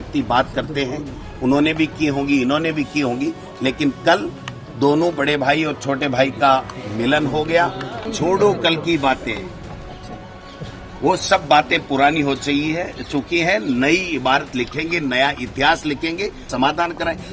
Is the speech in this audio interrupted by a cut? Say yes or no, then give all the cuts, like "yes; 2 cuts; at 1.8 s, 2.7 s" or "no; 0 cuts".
yes; 2 cuts; at 8.0 s, 16.5 s